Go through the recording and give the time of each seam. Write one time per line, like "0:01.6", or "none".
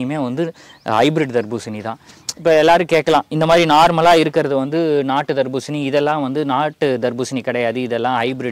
none